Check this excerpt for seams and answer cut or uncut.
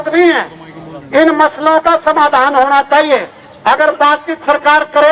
uncut